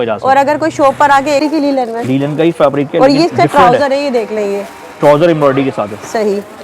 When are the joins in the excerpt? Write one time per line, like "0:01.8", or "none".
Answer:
0:01.4